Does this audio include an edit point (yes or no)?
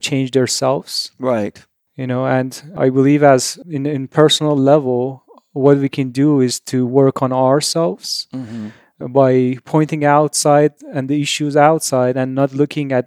no